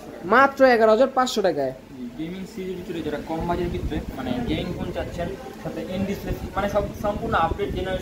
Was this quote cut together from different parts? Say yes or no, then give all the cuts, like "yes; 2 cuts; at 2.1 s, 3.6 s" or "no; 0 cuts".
no; 0 cuts